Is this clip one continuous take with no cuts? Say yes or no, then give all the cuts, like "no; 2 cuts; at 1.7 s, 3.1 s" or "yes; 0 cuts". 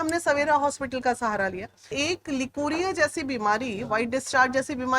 no; 1 cut; at 1.9 s